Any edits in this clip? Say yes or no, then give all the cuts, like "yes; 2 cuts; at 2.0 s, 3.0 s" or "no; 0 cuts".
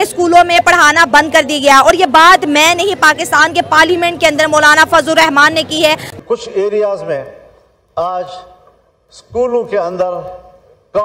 yes; 1 cut; at 6.1 s